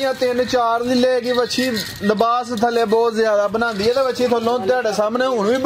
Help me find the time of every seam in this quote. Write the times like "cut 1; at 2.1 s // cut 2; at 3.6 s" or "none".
none